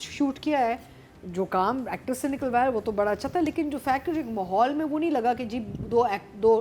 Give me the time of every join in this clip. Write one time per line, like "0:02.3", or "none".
none